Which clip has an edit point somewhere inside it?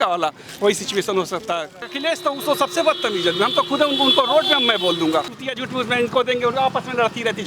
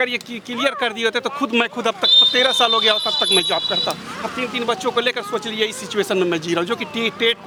first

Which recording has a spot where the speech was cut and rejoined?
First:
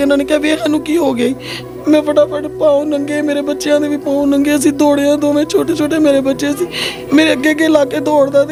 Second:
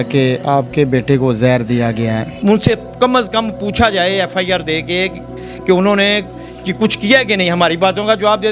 second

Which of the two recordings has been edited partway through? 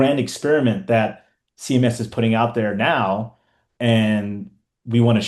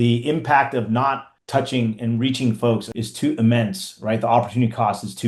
second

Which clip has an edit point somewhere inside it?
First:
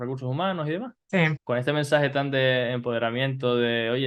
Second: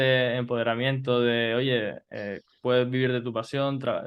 first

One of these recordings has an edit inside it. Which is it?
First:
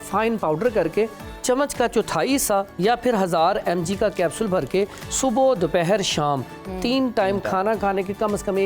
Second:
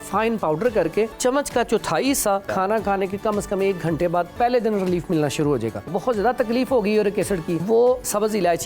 second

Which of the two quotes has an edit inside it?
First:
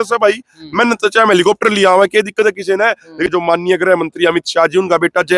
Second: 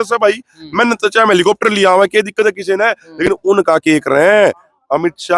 first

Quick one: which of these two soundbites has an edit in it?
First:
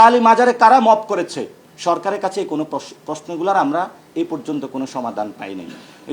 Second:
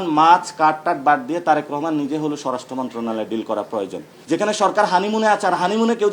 second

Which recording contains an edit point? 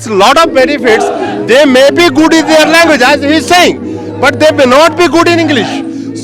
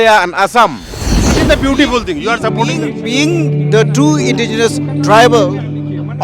second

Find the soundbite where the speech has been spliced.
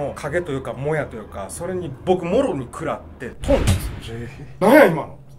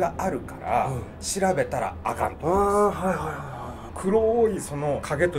second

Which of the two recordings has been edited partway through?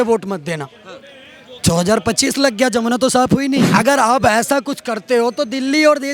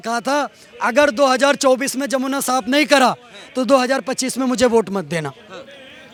first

